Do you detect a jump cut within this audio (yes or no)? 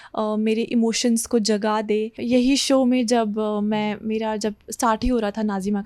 yes